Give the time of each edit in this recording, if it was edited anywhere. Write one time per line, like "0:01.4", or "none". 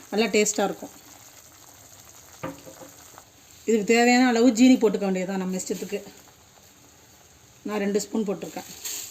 0:03.7